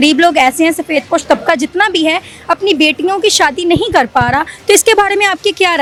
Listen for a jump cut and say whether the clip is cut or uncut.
uncut